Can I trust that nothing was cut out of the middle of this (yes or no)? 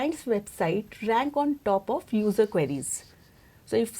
yes